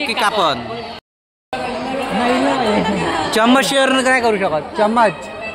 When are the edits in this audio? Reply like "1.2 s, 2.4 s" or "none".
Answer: none